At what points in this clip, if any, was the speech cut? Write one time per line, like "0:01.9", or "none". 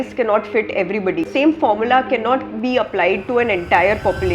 0:01.3